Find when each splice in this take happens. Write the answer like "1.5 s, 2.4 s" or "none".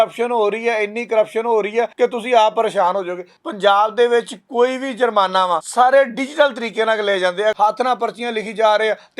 1.9 s, 3.3 s, 5.7 s, 7.5 s